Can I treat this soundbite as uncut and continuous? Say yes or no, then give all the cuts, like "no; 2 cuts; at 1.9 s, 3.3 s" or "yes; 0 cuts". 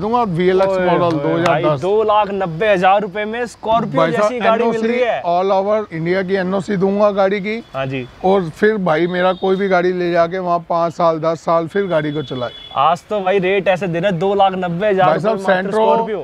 yes; 0 cuts